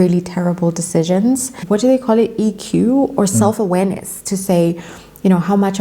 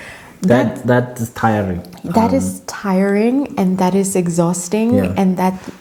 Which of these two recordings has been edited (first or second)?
first